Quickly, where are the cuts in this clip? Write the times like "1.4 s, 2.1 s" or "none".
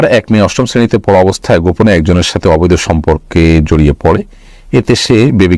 none